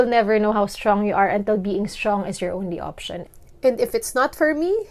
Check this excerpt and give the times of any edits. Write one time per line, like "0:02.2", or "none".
0:03.2